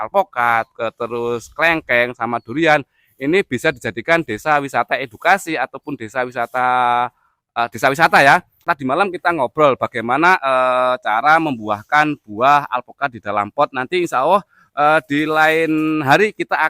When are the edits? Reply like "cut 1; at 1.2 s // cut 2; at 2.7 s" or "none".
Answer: cut 1; at 8.7 s